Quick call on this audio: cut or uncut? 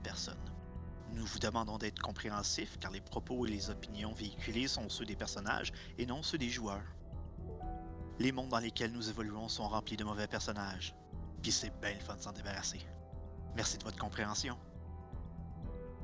uncut